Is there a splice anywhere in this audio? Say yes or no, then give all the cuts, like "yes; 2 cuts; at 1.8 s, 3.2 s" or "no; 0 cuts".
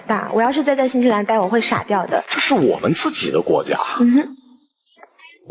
yes; 1 cut; at 2.3 s